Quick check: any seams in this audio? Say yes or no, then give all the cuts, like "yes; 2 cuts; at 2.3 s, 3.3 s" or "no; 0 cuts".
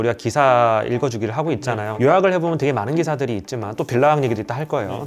yes; 1 cut; at 1.9 s